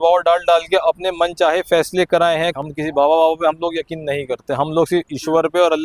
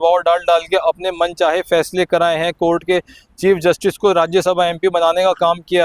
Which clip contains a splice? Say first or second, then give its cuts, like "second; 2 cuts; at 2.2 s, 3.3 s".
first; 1 cut; at 2.5 s